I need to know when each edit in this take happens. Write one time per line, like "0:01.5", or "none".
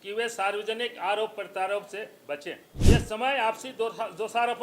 0:02.7